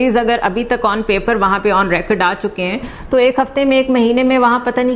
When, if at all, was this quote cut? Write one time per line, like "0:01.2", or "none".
none